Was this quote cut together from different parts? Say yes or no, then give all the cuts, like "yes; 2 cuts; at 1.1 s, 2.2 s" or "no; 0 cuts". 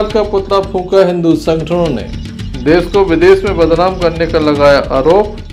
no; 0 cuts